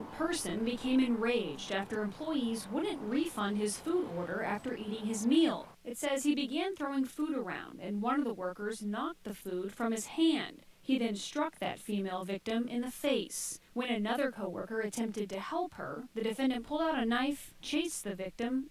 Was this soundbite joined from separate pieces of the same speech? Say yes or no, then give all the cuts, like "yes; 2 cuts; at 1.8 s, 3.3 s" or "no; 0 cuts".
yes; 3 cuts; at 10.6 s, 12.9 s, 14.4 s